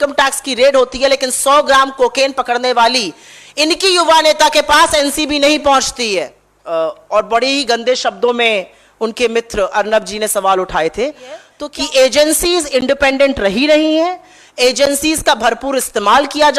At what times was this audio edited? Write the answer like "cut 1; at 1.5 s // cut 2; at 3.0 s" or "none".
cut 1; at 6.3 s // cut 2; at 11.5 s